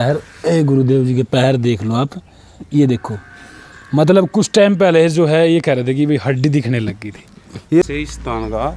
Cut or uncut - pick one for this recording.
cut